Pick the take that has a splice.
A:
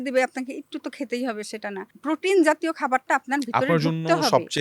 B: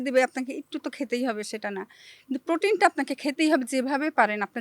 A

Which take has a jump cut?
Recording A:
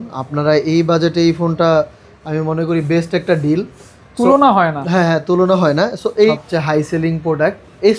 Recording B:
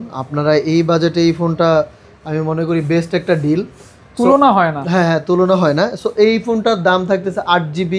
A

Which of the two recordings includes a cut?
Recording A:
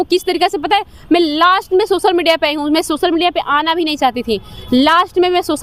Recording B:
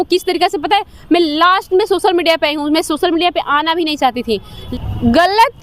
B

